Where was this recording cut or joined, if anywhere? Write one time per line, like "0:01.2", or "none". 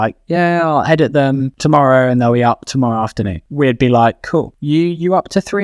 0:01.5
0:03.4
0:04.6